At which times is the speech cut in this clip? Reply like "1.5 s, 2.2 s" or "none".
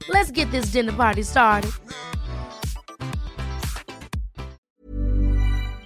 4.6 s